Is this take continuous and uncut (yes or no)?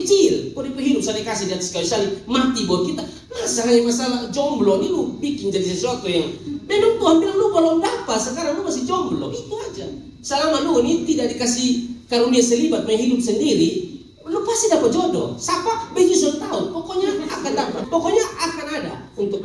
yes